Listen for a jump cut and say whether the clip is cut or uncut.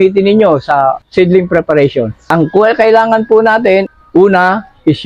cut